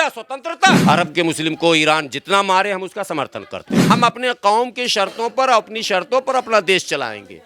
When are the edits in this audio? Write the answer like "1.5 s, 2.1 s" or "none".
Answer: 0.8 s, 3.9 s